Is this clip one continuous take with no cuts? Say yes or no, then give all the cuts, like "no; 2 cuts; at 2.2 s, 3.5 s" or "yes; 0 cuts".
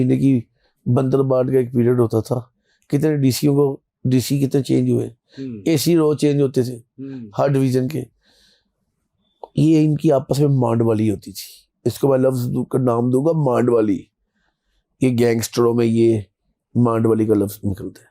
yes; 0 cuts